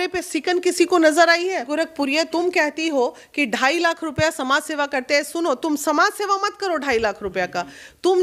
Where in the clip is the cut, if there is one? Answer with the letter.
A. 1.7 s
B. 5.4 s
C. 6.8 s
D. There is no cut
A